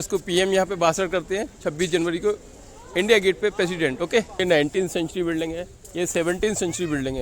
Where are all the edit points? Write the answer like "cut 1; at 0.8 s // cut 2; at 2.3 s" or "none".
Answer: cut 1; at 4.4 s

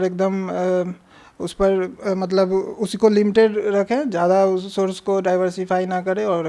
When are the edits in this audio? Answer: none

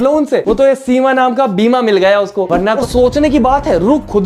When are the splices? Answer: cut 1; at 2.8 s

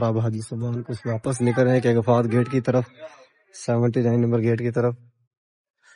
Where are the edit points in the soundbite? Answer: none

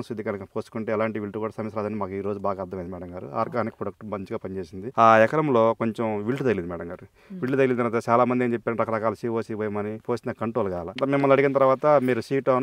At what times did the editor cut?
cut 1; at 4.9 s // cut 2; at 10.0 s

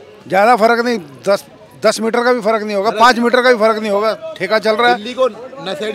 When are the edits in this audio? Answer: none

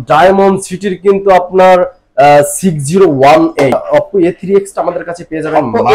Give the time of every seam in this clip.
cut 1; at 3.8 s

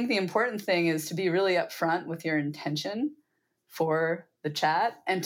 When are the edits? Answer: none

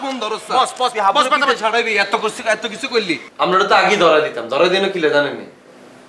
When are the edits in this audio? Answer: cut 1; at 3.2 s

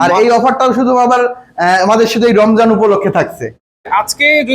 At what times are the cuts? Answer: cut 1; at 3.6 s

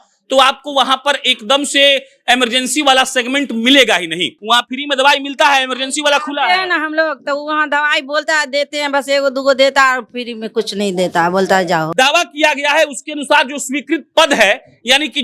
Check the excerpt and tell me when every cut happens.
cut 1; at 4.3 s // cut 2; at 11.9 s

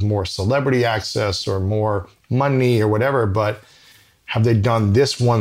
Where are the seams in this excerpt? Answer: none

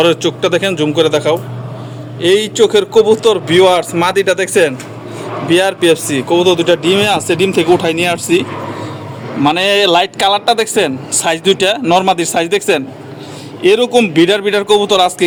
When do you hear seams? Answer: none

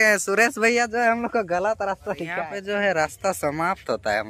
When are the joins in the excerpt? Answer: cut 1; at 2.5 s

